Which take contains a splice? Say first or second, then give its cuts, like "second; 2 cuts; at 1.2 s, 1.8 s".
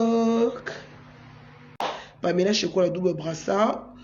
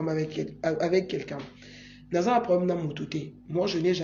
first; 1 cut; at 1.8 s